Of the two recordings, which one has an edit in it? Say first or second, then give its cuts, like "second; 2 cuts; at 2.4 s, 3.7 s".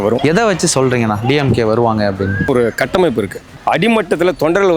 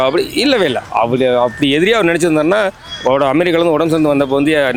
first; 2 cuts; at 2.5 s, 3.5 s